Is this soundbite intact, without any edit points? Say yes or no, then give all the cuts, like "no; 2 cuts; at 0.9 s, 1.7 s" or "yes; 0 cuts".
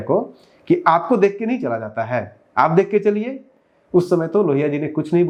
yes; 0 cuts